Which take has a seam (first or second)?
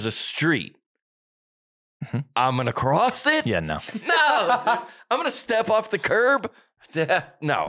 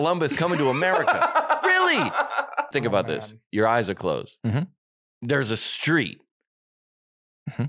second